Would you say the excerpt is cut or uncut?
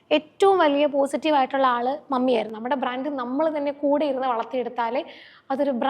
cut